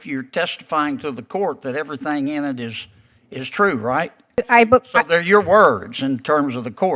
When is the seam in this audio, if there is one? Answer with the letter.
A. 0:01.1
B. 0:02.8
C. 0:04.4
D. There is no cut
C